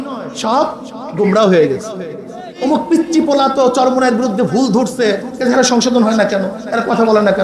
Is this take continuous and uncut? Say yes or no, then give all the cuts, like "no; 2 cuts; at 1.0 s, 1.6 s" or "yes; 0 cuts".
no; 1 cut; at 2.5 s